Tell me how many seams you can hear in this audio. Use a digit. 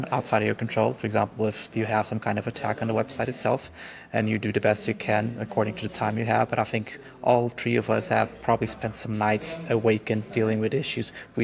0